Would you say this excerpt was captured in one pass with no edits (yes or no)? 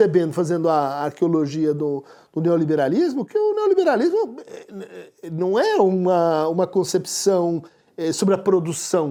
yes